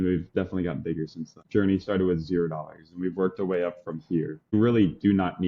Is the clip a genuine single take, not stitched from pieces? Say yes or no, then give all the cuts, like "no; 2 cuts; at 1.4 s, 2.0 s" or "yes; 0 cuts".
no; 2 cuts; at 1.4 s, 4.5 s